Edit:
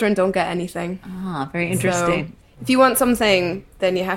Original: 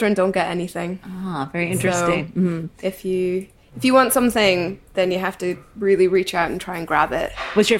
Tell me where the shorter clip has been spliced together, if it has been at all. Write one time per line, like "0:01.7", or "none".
0:02.3